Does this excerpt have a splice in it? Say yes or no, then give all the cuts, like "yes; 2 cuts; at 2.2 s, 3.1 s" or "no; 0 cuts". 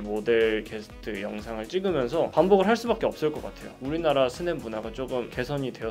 no; 0 cuts